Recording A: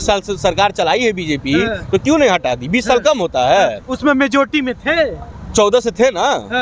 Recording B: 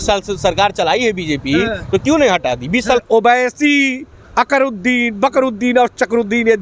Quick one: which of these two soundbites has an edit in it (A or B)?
B